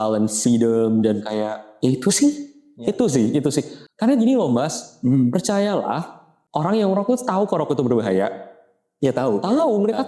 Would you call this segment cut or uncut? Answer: uncut